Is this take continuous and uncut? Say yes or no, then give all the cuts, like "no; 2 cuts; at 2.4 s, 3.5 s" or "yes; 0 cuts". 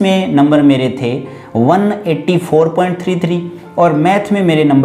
yes; 0 cuts